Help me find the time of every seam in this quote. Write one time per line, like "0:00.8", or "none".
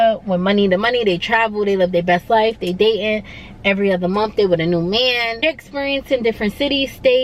0:05.4